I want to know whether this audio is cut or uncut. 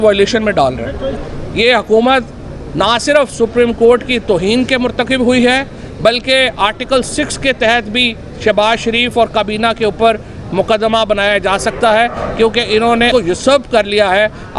cut